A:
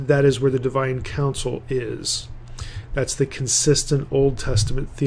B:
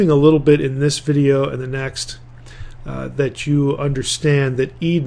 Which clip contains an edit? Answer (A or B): B